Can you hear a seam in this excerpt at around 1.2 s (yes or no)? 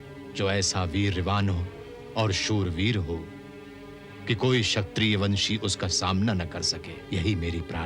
no